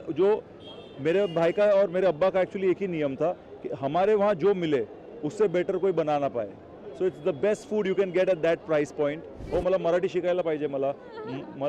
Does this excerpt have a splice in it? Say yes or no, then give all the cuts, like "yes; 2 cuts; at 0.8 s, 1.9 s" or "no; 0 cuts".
yes; 1 cut; at 9.3 s